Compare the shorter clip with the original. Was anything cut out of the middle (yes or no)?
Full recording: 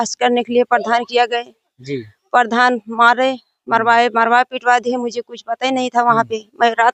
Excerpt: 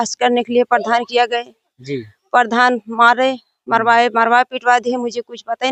no